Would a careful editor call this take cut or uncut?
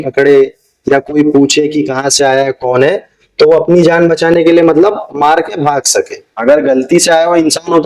cut